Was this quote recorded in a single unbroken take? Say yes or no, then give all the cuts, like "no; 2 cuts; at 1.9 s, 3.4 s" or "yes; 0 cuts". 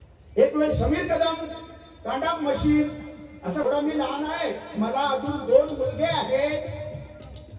no; 1 cut; at 3.6 s